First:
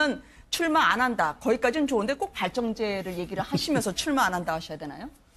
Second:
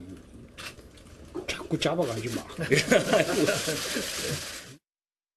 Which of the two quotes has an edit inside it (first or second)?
first